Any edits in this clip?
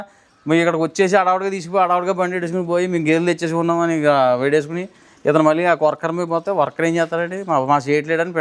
no; 0 cuts

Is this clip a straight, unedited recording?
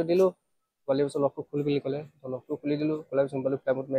yes; 0 cuts

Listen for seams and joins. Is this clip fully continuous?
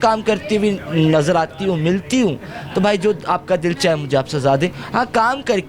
yes; 0 cuts

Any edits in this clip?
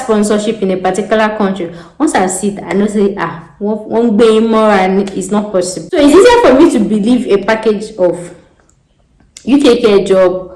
yes; 1 cut; at 5.8 s

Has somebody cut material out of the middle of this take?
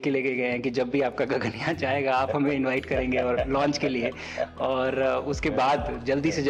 no; 0 cuts

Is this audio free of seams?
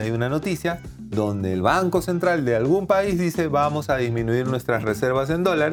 yes; 0 cuts

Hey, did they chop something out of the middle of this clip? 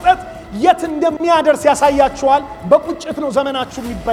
no; 0 cuts

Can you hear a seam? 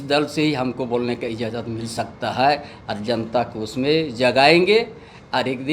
no; 0 cuts

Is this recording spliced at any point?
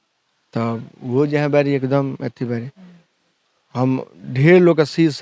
no; 0 cuts

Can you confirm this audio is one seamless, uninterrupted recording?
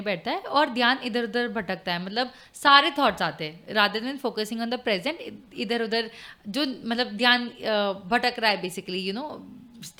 yes; 0 cuts

